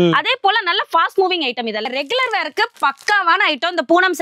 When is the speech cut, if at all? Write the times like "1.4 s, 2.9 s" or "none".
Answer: 1.9 s